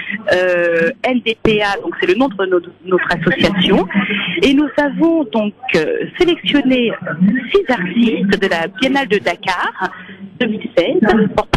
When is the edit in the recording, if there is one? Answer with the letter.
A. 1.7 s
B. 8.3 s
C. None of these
A